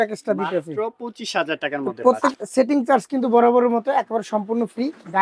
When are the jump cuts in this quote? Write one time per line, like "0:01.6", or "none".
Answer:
0:02.3